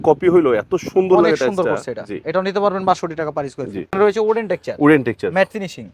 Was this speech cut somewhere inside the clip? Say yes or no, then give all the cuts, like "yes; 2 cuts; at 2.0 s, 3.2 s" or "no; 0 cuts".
yes; 1 cut; at 3.9 s